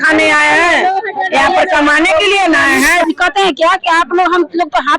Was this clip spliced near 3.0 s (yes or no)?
yes